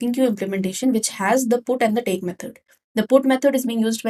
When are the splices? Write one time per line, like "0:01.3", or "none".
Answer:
none